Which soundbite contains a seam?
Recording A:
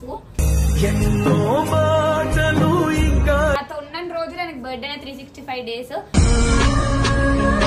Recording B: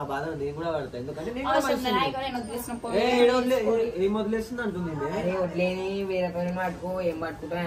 A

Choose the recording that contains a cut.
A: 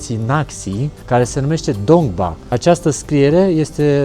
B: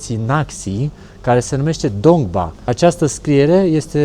A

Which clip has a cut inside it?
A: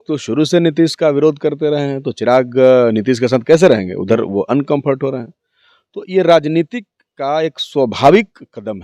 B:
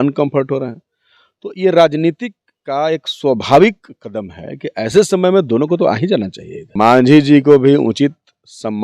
B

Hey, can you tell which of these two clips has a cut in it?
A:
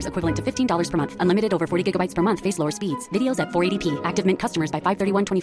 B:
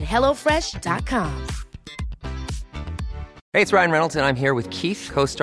B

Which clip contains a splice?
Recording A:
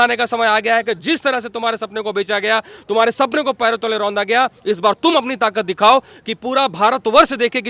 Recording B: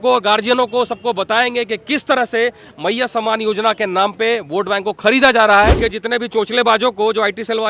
B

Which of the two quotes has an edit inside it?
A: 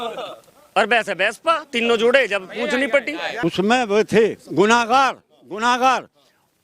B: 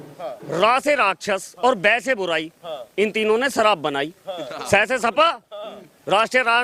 A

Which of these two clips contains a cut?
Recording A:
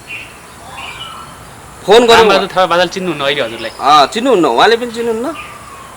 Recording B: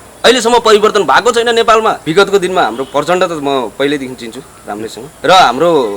B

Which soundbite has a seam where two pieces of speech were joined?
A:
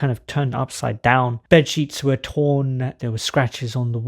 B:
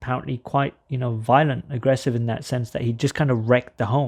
A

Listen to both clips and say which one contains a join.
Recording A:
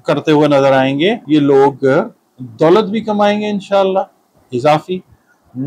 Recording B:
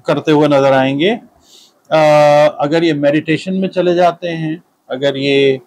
A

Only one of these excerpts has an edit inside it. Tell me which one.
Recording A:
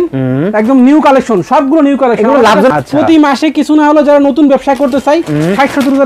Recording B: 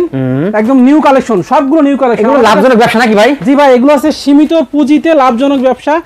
A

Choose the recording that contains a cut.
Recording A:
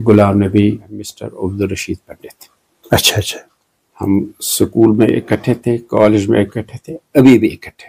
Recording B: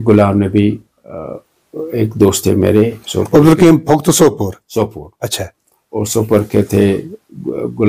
A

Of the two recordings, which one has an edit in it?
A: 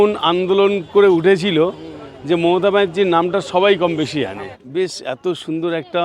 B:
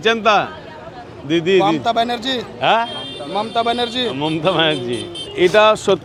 A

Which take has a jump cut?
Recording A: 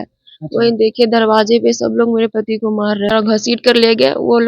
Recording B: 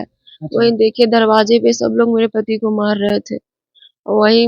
A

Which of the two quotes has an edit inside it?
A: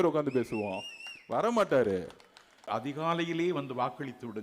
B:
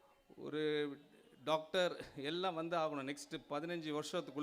A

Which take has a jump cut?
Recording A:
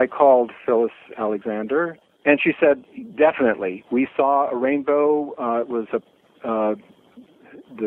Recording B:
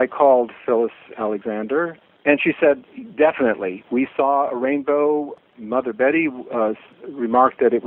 B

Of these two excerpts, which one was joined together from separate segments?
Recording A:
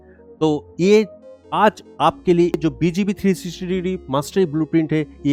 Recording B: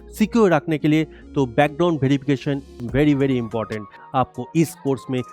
B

